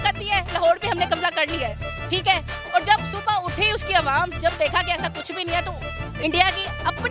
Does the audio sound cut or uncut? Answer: uncut